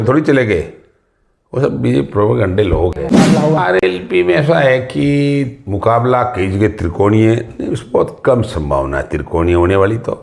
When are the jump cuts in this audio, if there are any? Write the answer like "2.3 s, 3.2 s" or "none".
3.3 s